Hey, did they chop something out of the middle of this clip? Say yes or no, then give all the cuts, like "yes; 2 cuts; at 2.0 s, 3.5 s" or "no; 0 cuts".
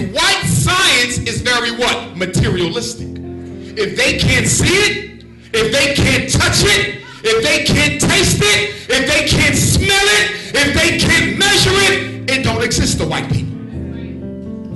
no; 0 cuts